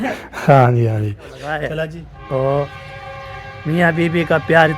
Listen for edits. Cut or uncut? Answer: cut